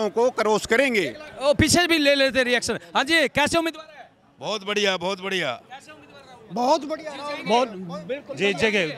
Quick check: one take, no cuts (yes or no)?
yes